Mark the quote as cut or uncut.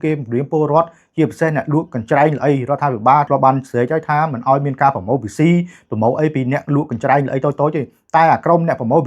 cut